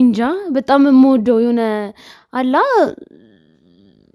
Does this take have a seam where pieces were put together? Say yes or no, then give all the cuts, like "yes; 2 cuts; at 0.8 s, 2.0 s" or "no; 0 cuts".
no; 0 cuts